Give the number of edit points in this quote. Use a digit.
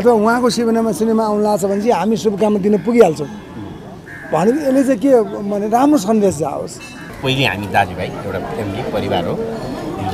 1